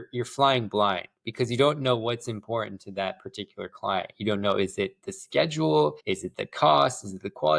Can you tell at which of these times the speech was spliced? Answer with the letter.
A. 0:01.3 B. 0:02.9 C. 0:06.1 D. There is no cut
C